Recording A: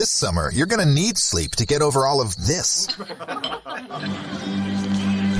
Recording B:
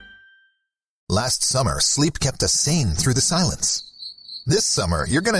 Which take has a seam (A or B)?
B